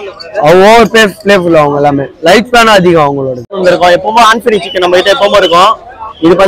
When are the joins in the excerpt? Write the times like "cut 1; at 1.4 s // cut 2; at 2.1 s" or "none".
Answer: cut 1; at 3.5 s